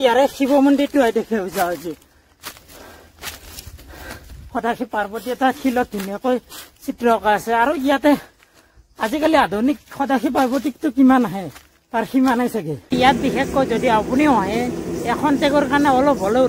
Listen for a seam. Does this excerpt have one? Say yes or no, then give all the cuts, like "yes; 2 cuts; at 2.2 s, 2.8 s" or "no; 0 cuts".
yes; 2 cuts; at 4.3 s, 12.9 s